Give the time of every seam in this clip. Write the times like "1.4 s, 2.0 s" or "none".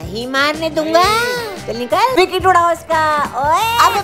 2.1 s